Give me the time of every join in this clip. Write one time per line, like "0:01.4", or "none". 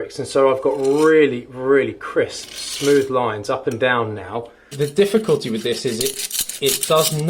0:04.6